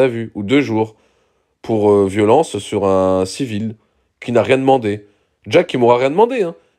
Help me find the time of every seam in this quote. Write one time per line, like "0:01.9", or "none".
none